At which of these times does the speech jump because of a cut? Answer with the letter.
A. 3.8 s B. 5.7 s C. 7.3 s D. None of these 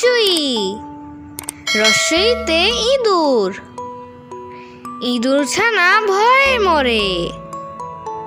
C